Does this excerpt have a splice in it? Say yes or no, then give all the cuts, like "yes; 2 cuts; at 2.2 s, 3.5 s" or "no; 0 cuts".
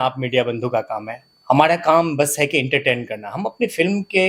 no; 0 cuts